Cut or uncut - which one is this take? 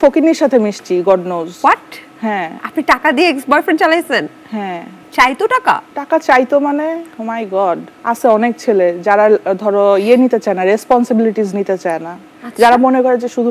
uncut